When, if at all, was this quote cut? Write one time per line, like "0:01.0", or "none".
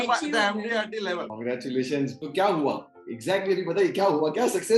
0:01.3
0:02.2